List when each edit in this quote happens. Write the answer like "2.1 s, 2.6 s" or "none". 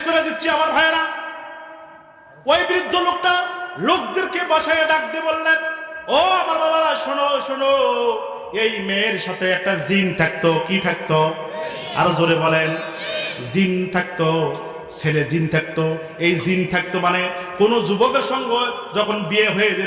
none